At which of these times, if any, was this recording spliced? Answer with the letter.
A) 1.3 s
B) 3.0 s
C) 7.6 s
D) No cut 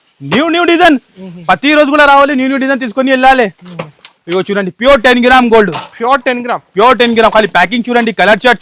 D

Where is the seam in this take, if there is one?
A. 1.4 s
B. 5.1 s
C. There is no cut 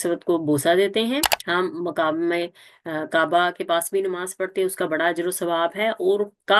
A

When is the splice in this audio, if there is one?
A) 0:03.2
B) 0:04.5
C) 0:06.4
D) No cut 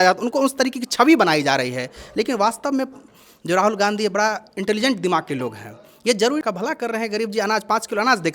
C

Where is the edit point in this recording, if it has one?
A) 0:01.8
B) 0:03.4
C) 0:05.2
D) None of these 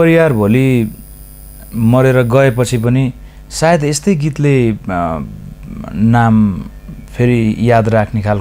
D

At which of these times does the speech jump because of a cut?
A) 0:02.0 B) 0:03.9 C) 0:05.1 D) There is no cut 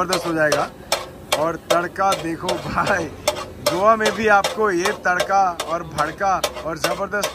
D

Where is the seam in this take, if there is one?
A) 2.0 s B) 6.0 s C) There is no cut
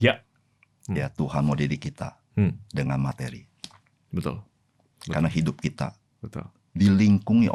C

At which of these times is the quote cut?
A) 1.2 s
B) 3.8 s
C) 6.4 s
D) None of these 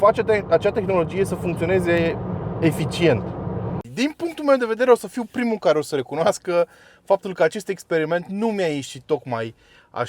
B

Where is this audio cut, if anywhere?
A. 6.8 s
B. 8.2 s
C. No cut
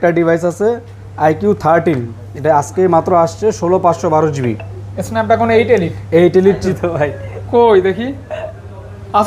A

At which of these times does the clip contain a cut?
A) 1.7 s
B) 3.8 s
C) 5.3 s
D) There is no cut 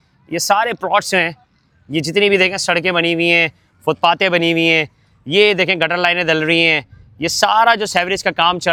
D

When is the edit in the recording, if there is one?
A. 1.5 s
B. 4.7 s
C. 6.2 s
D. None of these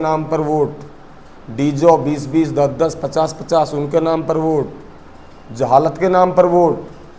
D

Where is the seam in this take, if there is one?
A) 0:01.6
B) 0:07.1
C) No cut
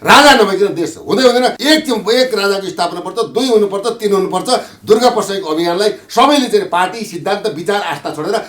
A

